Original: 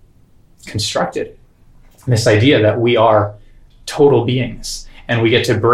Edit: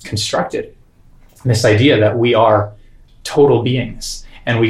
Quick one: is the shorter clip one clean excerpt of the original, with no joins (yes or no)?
yes